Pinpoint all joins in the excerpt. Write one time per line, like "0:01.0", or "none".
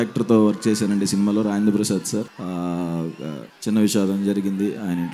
0:02.3
0:03.5

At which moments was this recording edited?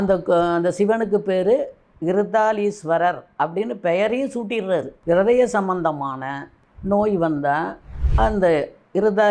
0:04.9

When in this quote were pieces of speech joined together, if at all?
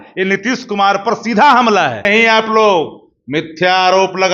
0:02.1

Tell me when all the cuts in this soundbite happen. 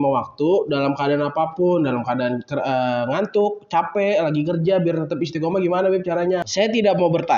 0:06.5

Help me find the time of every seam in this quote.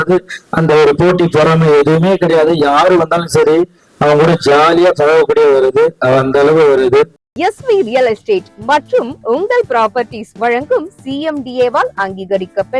0:07.3

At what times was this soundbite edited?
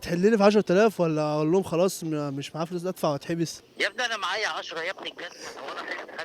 0:03.6

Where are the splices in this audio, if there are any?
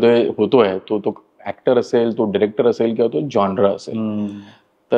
none

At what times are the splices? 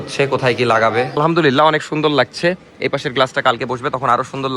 0:01.2

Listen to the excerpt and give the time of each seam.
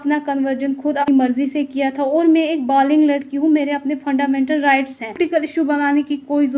0:01.1
0:05.2

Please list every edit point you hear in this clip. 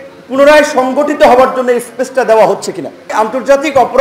0:03.1

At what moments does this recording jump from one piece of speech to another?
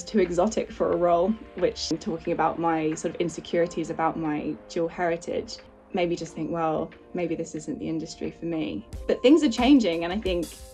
0:01.9
0:05.7

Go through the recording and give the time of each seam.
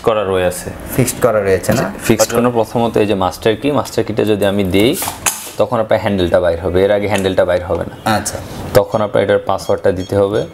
0:02.2

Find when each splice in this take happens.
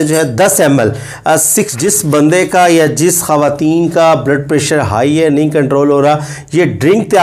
0:01.7

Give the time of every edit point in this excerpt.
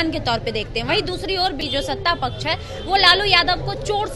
0:01.6

